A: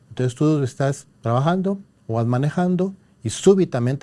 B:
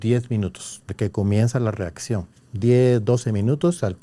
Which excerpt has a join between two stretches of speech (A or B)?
A